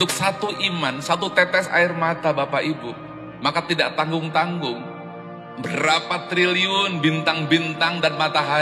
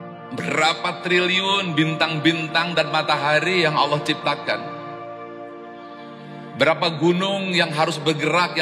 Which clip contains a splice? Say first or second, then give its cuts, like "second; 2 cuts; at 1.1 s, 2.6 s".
second; 2 cuts; at 4.6 s, 6.5 s